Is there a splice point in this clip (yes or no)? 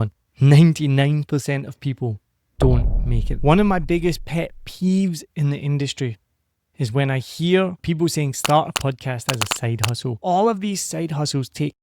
yes